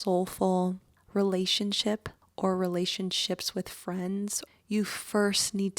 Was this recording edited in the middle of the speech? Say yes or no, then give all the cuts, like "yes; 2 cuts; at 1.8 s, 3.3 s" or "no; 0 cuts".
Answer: yes; 2 cuts; at 1.0 s, 4.4 s